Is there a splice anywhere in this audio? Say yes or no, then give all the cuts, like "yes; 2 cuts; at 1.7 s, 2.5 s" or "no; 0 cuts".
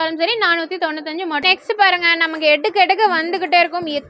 yes; 1 cut; at 1.4 s